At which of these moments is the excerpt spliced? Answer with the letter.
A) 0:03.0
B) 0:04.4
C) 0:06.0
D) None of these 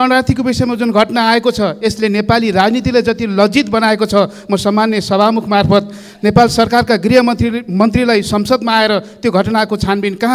D